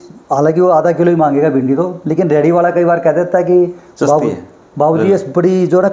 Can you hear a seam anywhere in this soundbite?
no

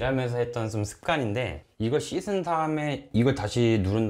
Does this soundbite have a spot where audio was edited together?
yes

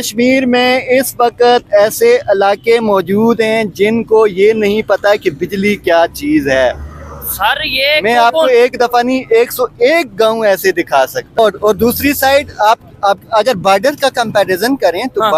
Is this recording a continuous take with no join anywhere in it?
no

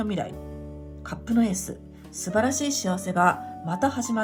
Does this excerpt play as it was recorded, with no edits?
yes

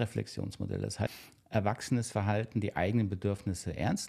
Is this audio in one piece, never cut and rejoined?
no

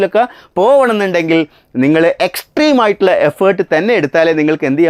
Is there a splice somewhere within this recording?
no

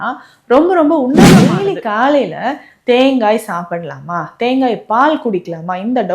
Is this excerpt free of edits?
no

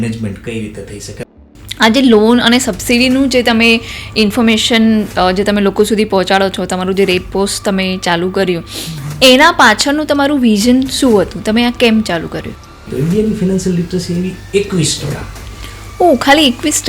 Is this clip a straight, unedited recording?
no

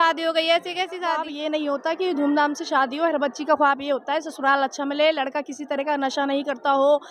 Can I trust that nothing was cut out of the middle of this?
no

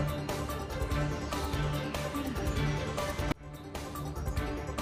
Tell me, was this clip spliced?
no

